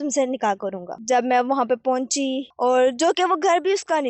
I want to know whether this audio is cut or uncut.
cut